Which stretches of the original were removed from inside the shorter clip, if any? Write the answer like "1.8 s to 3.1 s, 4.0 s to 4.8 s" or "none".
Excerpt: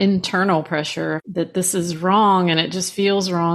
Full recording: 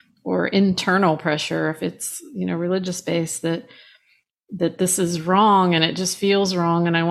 1.8 s to 4.5 s

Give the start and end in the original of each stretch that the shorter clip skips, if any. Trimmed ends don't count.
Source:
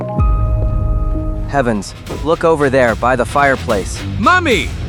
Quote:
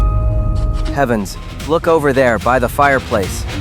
1.2 s to 1.5 s

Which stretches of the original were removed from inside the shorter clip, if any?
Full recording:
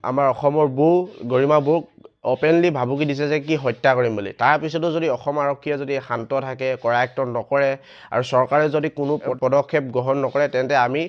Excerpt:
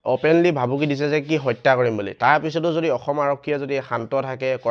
none

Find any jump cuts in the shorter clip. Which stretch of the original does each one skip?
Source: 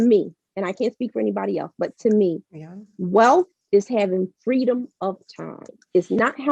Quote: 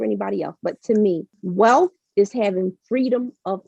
2.5 s to 2.9 s

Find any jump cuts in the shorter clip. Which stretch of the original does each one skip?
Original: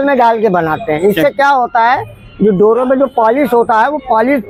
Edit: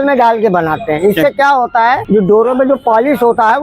2.0 s to 2.3 s

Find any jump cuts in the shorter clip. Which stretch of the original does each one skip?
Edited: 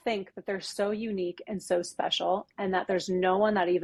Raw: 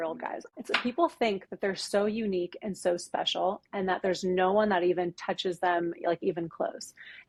none

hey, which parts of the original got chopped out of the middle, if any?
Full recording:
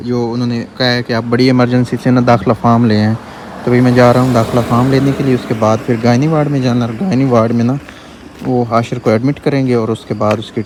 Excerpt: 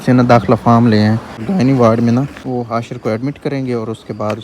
3.4 s to 6.9 s, 7.9 s to 8.4 s

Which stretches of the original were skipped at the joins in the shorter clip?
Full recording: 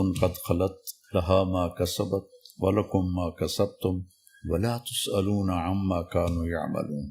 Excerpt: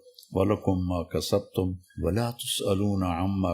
4.1 s to 4.3 s

